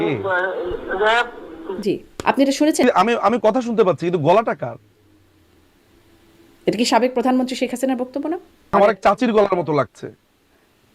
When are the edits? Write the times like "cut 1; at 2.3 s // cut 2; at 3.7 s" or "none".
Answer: cut 1; at 2.8 s // cut 2; at 8.7 s